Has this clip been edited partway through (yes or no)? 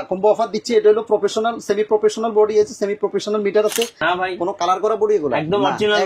yes